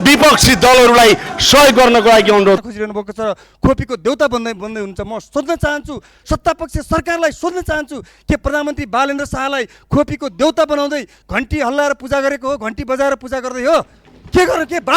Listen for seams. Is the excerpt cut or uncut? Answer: cut